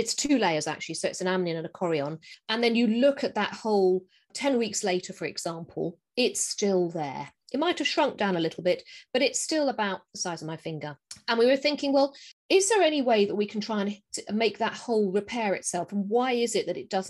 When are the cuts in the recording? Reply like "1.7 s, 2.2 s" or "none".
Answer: 4.3 s